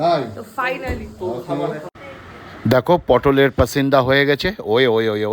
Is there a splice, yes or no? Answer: yes